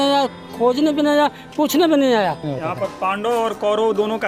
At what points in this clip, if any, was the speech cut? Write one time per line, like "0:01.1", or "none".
0:02.5

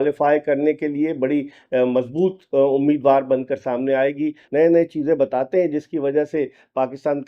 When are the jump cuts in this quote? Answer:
0:04.4

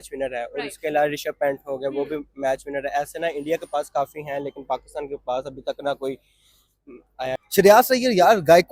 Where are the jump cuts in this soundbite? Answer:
0:07.4

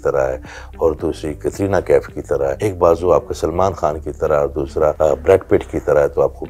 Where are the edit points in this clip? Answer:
0:02.6
0:04.9

